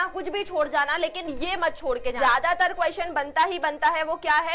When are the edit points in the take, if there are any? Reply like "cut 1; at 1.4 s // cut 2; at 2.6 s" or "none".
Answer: cut 1; at 2.2 s

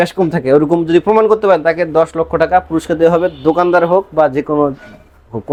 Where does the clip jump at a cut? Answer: none

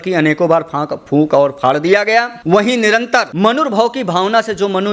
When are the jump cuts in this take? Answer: cut 1; at 2.4 s // cut 2; at 3.3 s

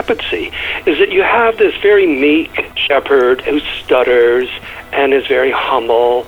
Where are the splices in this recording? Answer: cut 1; at 2.8 s // cut 2; at 3.4 s

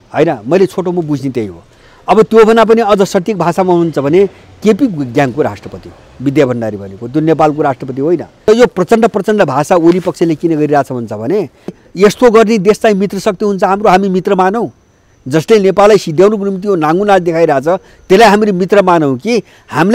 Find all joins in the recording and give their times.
cut 1; at 8.3 s // cut 2; at 11.8 s

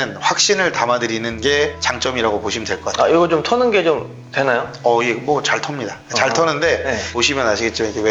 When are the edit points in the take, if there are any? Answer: cut 1; at 7.1 s

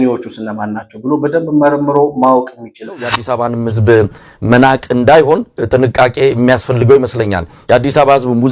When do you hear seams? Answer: cut 1; at 3.2 s

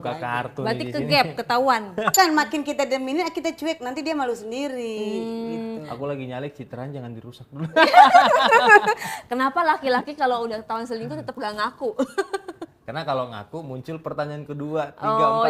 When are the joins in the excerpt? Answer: cut 1; at 2.1 s

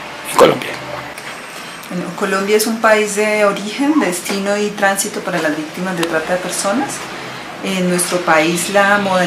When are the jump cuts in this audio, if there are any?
none

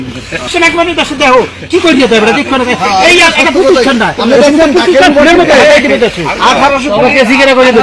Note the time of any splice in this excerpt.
none

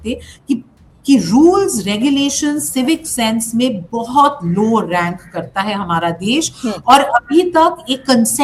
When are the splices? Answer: none

